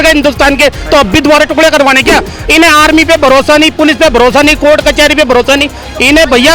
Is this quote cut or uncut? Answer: cut